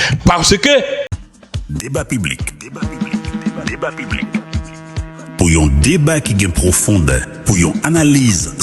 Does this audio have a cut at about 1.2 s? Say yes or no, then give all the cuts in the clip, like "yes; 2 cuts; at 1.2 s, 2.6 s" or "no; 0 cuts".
yes; 1 cut; at 1.2 s